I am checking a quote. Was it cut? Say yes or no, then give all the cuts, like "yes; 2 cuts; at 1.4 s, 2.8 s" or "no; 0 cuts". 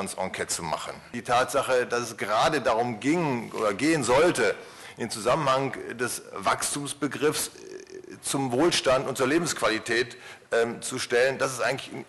yes; 1 cut; at 1.2 s